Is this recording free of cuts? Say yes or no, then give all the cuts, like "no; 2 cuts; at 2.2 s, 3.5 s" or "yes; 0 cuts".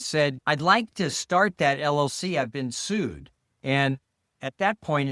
yes; 0 cuts